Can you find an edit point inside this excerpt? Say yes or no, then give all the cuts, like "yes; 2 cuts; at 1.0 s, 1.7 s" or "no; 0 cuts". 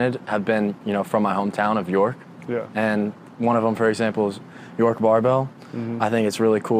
no; 0 cuts